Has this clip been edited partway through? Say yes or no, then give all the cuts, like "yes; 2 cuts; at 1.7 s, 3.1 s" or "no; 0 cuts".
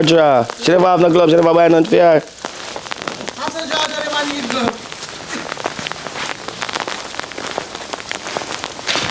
no; 0 cuts